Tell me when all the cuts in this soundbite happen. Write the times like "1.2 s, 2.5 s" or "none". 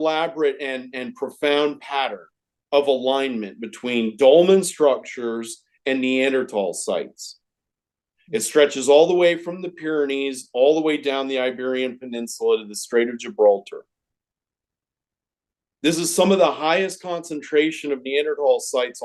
none